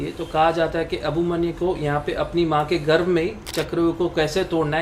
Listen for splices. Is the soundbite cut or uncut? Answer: uncut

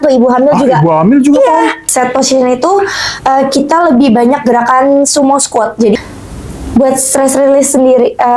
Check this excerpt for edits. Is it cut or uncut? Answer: cut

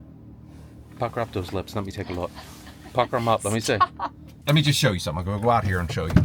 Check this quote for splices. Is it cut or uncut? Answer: cut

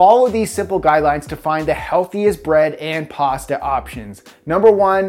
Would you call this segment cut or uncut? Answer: uncut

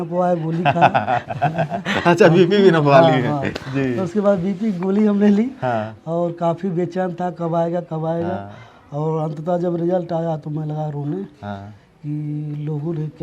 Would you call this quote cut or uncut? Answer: uncut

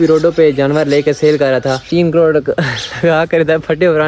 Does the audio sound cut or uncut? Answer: cut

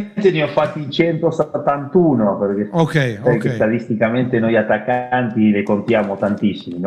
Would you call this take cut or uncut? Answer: uncut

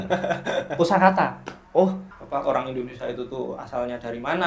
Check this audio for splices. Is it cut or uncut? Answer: cut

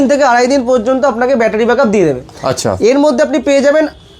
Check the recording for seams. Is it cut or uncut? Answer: uncut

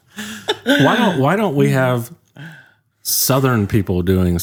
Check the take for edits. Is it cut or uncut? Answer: uncut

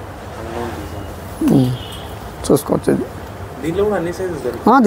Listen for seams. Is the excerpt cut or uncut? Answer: uncut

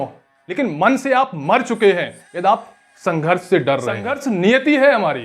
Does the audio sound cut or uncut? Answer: cut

